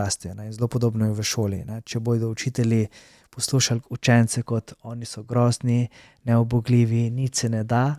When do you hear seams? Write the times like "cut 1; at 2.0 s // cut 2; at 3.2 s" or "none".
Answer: none